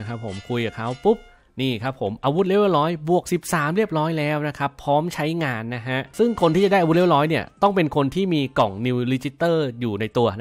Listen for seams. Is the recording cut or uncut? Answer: uncut